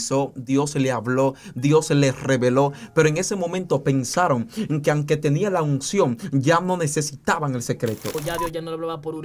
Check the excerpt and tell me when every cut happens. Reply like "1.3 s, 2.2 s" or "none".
8.1 s